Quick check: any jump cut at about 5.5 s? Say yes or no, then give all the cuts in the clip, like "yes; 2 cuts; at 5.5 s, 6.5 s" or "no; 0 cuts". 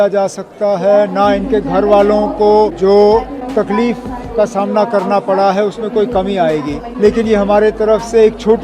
no; 3 cuts; at 2.7 s, 3.4 s, 6.9 s